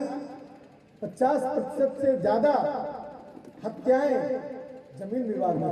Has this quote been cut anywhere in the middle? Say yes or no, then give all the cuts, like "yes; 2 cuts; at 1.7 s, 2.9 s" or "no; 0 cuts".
no; 0 cuts